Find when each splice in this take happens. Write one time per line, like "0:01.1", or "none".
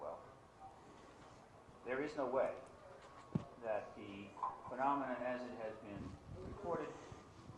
0:03.4